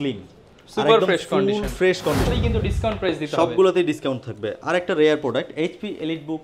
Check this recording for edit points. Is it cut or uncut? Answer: cut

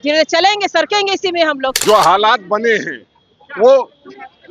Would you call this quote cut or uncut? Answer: cut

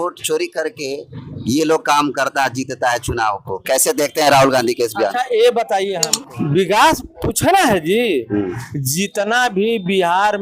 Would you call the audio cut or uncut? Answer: cut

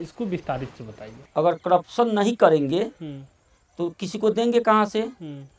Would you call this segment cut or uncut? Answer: cut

